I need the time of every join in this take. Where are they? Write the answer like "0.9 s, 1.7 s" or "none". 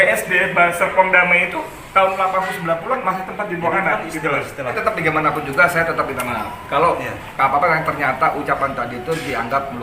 4.7 s